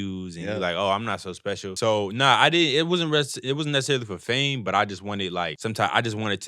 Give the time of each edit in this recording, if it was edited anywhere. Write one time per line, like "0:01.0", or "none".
0:01.7
0:05.6

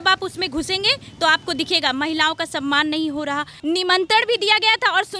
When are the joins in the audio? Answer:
0:03.5

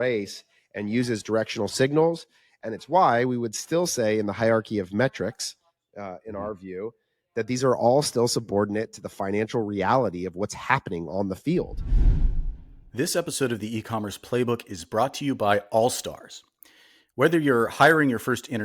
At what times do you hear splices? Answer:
0:11.8

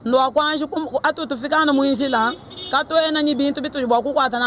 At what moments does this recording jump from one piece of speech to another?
none

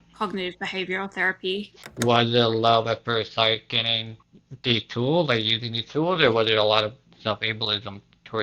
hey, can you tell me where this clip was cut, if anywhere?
0:01.8

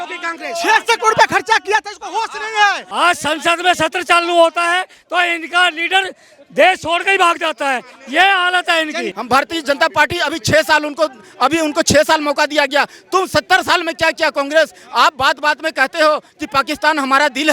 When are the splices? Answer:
0:02.8
0:09.1

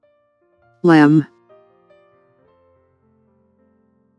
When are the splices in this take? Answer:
0:00.8
0:01.3

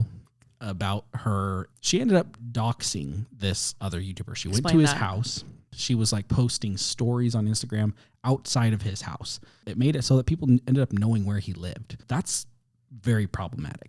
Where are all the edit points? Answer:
0:01.6
0:05.7
0:09.6
0:12.0

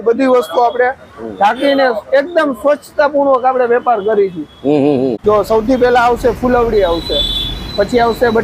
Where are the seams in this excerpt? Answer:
0:05.2

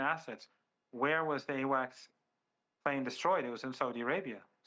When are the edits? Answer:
none

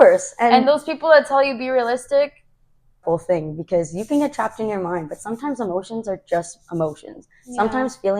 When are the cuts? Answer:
0:03.0

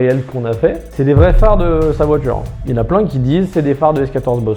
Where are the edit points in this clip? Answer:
none

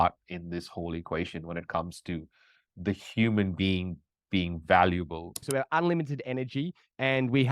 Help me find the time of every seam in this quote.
0:05.5

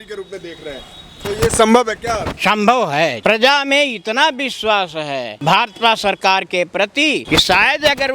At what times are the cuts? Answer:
0:02.3
0:03.2
0:05.3
0:07.2

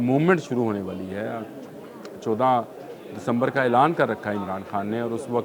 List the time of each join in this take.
none

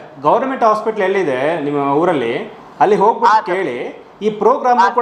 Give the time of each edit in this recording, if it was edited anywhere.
none

